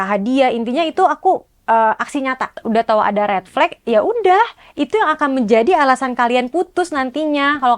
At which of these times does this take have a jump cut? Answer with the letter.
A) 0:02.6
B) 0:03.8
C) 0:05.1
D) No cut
A